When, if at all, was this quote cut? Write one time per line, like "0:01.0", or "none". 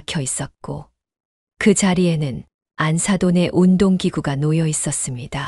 none